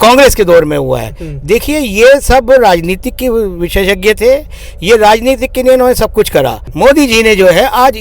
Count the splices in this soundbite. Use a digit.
1